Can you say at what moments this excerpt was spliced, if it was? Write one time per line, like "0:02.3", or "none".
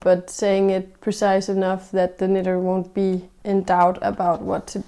0:03.3